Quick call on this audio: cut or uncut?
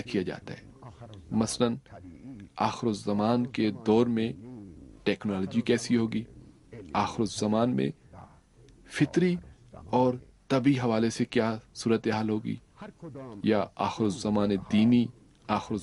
uncut